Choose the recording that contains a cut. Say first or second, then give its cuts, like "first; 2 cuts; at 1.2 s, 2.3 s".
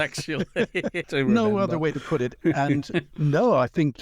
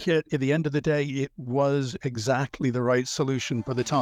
first; 3 cuts; at 1.0 s, 2.4 s, 3.1 s